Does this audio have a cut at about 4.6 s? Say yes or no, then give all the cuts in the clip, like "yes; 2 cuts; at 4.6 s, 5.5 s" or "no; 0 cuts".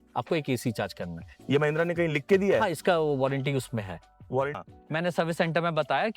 yes; 1 cut; at 4.6 s